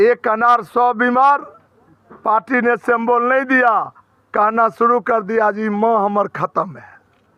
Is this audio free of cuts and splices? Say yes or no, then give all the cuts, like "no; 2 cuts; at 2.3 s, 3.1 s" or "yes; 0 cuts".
yes; 0 cuts